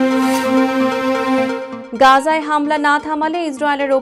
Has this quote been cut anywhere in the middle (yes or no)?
no